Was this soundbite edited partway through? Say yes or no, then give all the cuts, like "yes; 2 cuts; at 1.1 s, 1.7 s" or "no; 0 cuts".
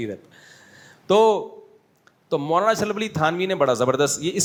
no; 0 cuts